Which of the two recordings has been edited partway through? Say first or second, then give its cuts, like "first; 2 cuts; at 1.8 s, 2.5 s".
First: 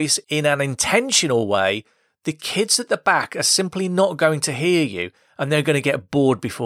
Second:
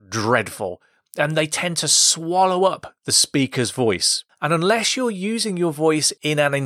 second; 1 cut; at 4.2 s